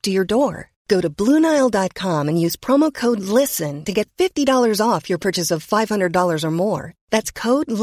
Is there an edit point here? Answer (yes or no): no